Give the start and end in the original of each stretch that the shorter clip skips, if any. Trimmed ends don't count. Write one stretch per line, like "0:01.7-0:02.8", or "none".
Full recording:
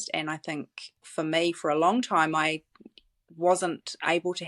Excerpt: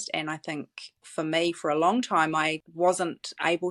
0:02.6-0:03.3